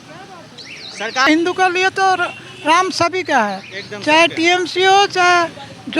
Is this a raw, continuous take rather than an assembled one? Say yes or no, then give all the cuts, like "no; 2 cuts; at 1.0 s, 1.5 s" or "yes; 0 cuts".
no; 1 cut; at 1.3 s